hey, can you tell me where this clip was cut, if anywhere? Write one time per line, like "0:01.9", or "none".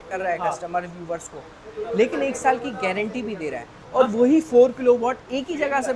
none